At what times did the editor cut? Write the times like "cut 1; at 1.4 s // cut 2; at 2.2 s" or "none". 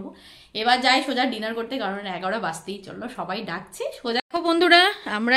cut 1; at 4.2 s